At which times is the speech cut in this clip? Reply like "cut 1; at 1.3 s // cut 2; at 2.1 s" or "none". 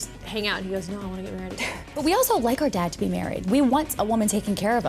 cut 1; at 1.9 s